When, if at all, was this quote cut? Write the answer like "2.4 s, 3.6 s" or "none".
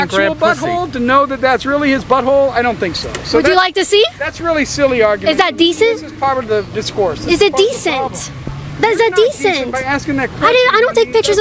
none